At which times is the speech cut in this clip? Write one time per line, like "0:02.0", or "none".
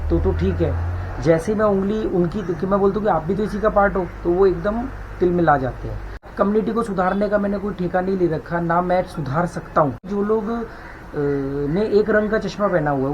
0:06.3
0:10.0